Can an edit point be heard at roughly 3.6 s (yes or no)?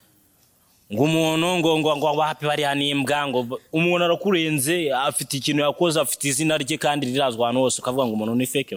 no